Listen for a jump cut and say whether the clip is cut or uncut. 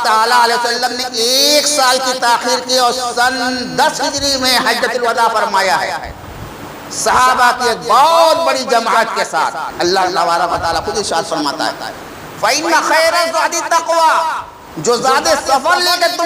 cut